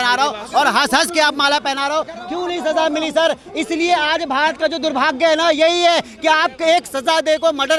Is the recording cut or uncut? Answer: uncut